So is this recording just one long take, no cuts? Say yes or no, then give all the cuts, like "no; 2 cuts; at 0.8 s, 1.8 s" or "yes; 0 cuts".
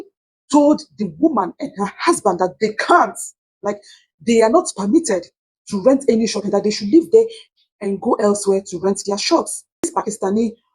no; 1 cut; at 9.9 s